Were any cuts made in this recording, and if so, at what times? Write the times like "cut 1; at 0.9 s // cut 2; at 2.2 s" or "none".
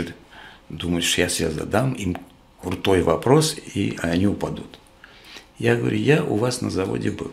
none